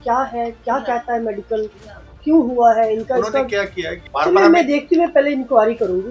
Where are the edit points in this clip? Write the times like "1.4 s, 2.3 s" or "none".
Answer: 4.0 s